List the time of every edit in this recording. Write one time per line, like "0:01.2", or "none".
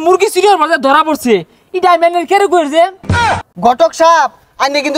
0:03.2